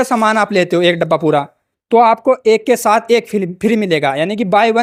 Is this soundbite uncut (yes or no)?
yes